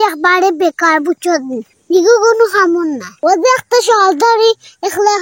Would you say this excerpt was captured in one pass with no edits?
no; 1 cut; at 3.2 s

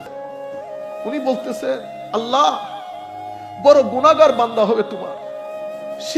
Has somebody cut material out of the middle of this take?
yes; 1 cut; at 1.1 s

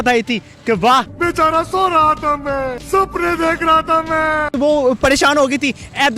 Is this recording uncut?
no; 1 cut; at 4.5 s

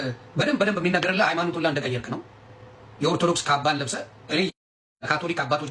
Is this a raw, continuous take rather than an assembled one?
yes; 0 cuts

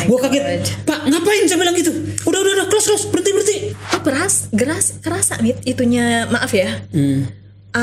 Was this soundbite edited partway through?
yes; 1 cut; at 4.0 s

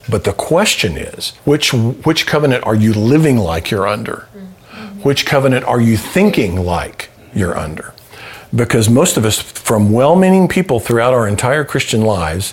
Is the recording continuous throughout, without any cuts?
yes; 0 cuts

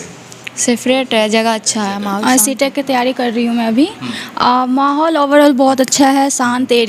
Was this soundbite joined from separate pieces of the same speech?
yes; 1 cut; at 2.1 s

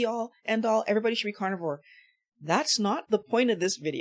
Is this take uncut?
yes; 0 cuts

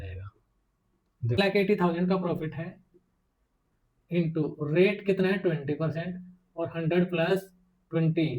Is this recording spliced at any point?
yes; 1 cut; at 1.4 s

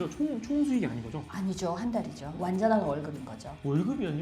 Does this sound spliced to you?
yes; 1 cut; at 2.2 s

